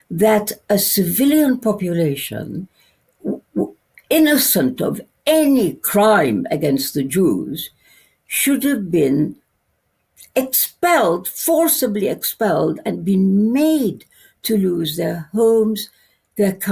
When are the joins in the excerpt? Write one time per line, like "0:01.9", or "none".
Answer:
none